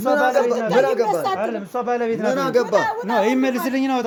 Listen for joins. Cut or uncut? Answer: uncut